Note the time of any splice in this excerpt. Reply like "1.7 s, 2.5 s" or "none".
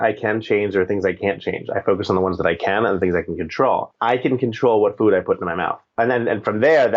3.9 s, 6.0 s